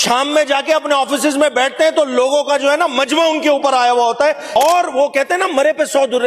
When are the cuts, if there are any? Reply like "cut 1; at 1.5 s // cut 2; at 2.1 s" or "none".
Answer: cut 1; at 4.4 s